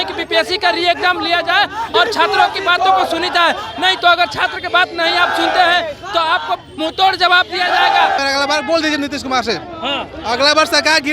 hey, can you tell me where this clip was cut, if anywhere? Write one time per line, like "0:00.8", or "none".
0:08.2